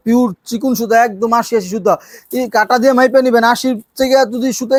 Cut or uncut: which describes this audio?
uncut